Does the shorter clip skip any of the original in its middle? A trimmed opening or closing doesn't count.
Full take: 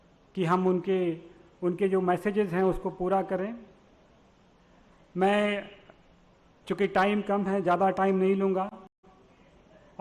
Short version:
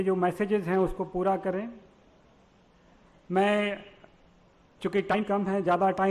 yes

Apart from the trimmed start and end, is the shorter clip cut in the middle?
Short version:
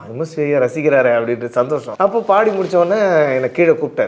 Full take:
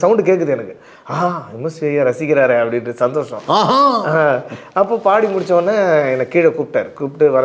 yes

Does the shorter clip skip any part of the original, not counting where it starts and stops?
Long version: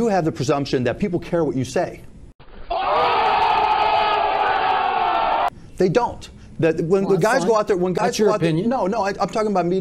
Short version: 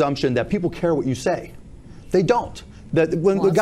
yes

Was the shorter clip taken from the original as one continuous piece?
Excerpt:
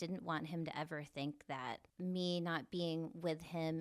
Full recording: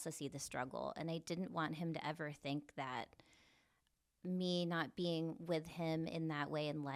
no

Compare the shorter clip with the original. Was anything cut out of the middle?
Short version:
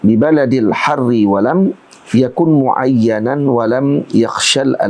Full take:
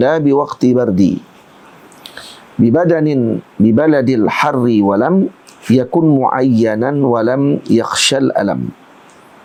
no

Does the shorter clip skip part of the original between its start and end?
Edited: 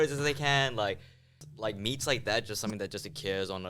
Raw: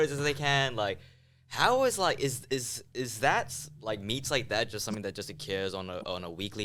yes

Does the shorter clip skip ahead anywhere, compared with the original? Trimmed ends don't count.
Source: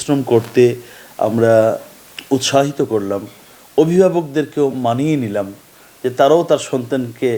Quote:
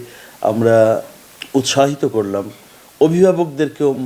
no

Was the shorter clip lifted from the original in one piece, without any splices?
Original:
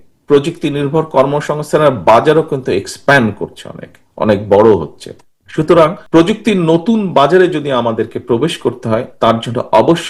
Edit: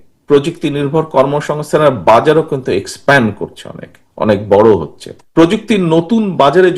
no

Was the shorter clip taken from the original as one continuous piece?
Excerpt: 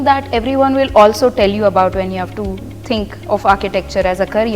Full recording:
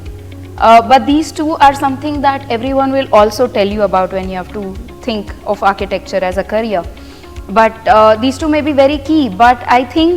yes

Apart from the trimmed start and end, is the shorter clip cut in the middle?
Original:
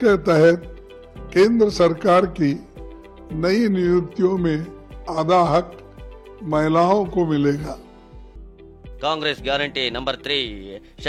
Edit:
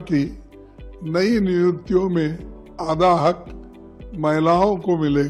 no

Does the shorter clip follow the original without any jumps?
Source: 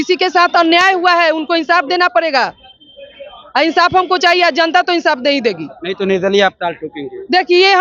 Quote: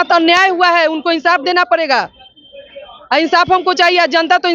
yes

